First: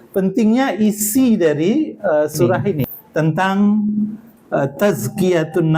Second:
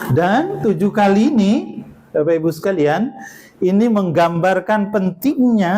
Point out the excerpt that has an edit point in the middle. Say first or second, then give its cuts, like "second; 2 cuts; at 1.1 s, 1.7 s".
first; 1 cut; at 2.9 s